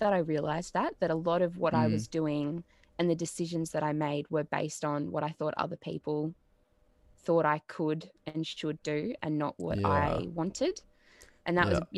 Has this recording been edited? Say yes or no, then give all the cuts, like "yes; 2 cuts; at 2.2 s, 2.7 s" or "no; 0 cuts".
no; 0 cuts